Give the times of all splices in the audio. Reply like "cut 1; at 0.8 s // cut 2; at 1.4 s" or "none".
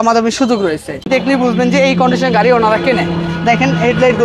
cut 1; at 1.0 s